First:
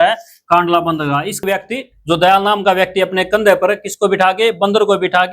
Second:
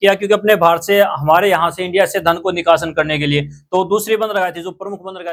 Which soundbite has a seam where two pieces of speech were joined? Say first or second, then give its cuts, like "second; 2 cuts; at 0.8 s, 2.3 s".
first; 1 cut; at 1.4 s